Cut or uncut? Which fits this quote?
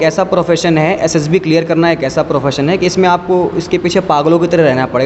uncut